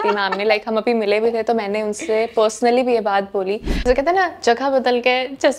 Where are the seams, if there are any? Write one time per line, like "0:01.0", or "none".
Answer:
0:03.7